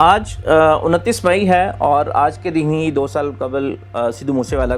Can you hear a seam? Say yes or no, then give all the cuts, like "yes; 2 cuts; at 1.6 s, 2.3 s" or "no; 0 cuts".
no; 0 cuts